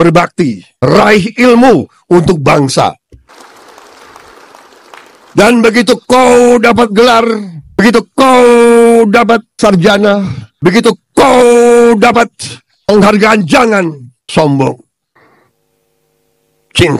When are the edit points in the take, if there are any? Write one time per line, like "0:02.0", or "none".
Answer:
none